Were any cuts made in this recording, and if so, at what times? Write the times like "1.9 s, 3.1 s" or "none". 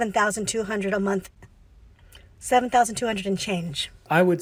none